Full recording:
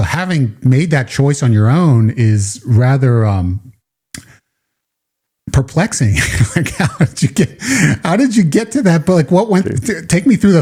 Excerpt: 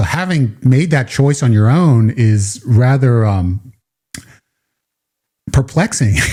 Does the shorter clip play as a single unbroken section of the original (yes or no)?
yes